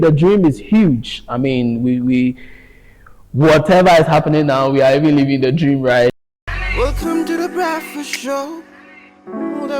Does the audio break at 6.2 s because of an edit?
yes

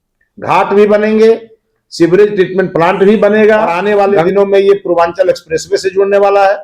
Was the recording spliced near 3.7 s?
yes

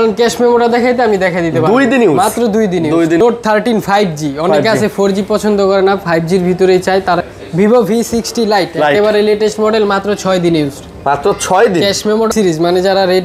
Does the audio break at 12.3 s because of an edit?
yes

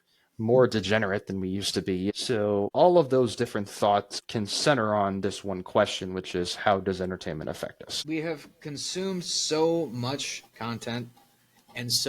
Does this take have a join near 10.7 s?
no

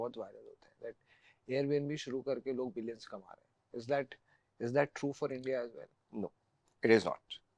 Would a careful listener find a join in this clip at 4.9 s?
no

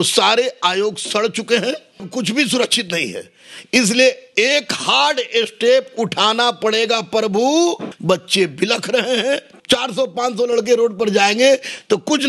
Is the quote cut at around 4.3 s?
no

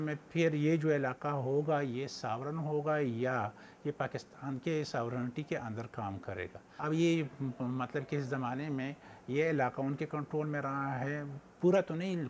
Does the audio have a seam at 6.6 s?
yes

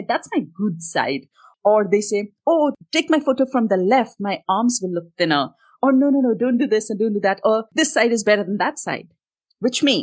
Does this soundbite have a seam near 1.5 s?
yes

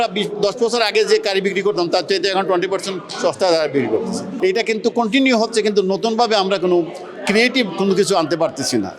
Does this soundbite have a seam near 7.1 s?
no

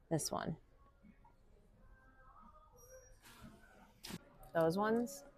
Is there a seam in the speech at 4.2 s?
yes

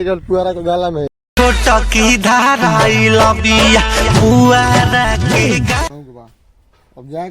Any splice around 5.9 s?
yes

